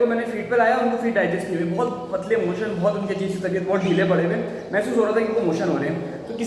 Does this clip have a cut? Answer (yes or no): no